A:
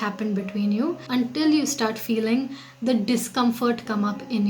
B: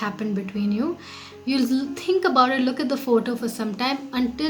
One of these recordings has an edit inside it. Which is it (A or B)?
A